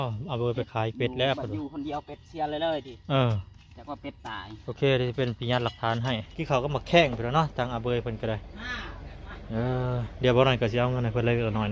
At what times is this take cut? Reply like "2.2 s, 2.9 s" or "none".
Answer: 6.3 s